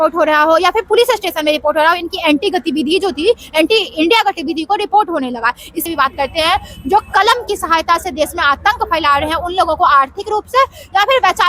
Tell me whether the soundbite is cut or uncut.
cut